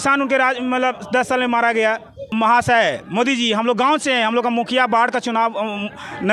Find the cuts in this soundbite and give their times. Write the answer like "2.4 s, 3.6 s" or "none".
2.3 s